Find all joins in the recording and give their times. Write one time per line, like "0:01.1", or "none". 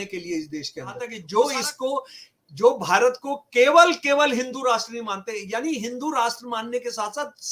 0:01.1